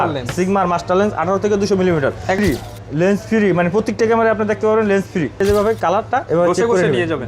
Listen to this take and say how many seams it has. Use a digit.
2